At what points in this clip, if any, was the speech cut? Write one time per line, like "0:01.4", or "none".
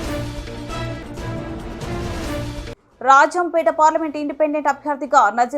0:01.2
0:02.5